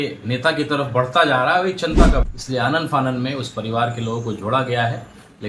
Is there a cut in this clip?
yes; 1 cut; at 2.3 s

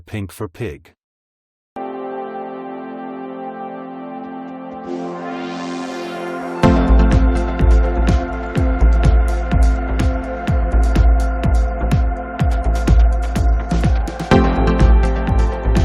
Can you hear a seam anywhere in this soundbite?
yes; 1 cut; at 1.7 s

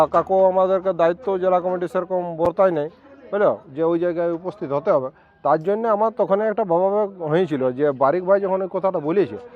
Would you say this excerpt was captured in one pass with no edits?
yes; 0 cuts

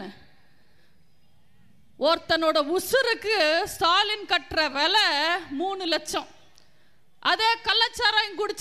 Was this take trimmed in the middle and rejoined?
no; 0 cuts

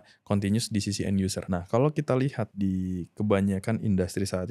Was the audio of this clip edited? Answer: yes; 2 cuts; at 1.4 s, 2.4 s

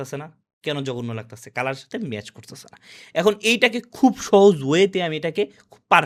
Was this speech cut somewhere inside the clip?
no; 0 cuts

